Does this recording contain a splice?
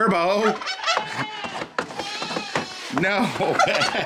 no; 0 cuts

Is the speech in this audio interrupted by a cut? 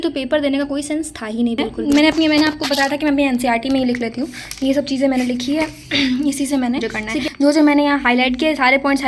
yes; 2 cuts; at 1.7 s, 7.3 s

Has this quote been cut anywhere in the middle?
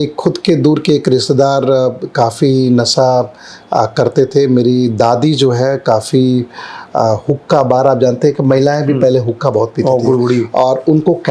no; 0 cuts

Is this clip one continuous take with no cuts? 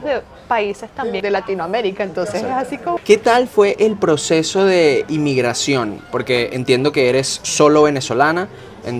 no; 2 cuts; at 1.2 s, 3.0 s

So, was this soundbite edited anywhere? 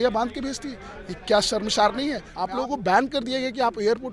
yes; 1 cut; at 2.3 s

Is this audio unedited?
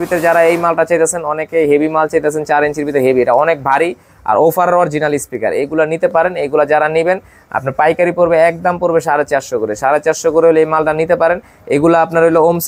yes; 0 cuts

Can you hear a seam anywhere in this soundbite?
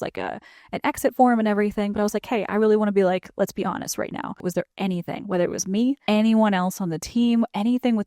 yes; 2 cuts; at 4.4 s, 6.0 s

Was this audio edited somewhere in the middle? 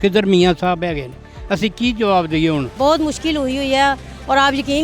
yes; 1 cut; at 2.7 s

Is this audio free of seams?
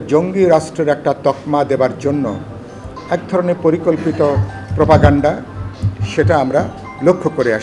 yes; 0 cuts

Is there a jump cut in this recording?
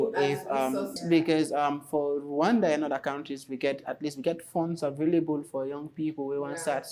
yes; 1 cut; at 1.0 s

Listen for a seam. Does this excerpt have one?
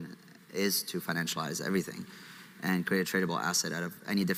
no; 0 cuts

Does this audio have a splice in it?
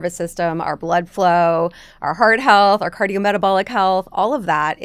no; 0 cuts

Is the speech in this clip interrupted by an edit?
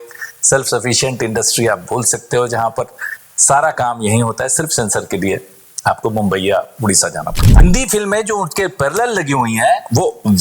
yes; 1 cut; at 7.6 s

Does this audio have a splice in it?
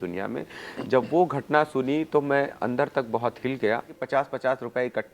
yes; 1 cut; at 4.0 s

